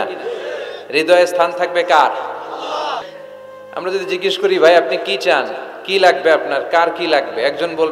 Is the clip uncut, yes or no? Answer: no